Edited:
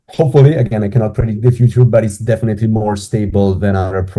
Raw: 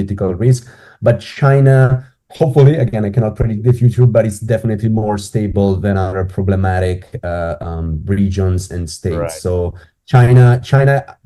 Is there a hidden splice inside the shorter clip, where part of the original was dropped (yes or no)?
no